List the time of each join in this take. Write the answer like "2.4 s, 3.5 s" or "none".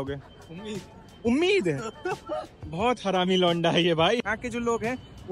4.3 s